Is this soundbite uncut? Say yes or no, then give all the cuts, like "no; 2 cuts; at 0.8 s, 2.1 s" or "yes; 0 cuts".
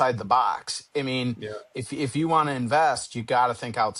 yes; 0 cuts